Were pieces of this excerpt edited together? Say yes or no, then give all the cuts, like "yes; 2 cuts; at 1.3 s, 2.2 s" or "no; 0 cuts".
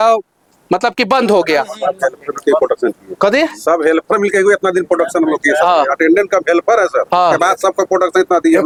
no; 0 cuts